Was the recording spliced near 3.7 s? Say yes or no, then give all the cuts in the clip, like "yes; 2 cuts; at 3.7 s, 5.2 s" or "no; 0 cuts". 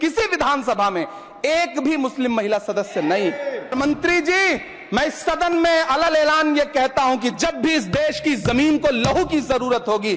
yes; 1 cut; at 3.7 s